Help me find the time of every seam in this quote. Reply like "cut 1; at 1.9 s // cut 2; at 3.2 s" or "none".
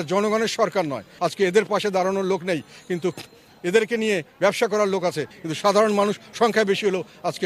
cut 1; at 1.1 s // cut 2; at 5.3 s